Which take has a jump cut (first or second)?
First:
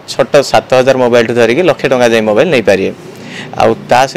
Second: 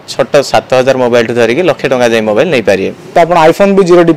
second